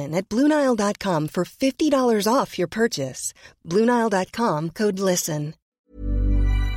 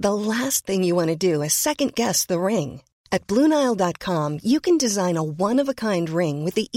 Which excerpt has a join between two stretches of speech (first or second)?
first